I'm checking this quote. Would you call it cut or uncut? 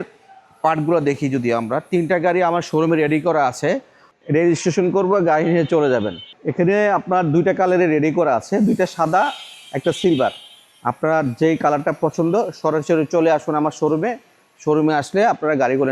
uncut